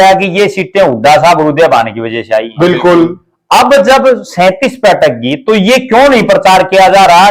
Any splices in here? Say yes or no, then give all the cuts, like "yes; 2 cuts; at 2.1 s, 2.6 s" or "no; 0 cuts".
no; 0 cuts